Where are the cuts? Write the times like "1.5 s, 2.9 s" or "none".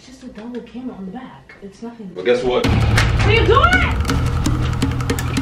none